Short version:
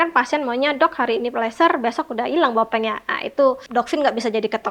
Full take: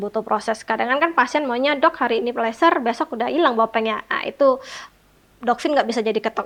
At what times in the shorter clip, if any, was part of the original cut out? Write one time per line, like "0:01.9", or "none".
0:03.6